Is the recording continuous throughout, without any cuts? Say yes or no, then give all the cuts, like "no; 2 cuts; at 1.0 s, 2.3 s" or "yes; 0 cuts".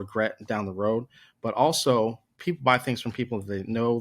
no; 1 cut; at 2.3 s